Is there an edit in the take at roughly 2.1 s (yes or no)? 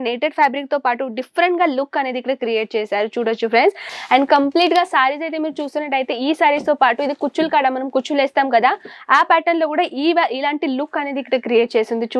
no